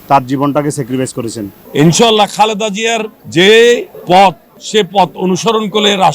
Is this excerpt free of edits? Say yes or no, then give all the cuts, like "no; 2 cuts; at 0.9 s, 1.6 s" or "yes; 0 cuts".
no; 1 cut; at 1.6 s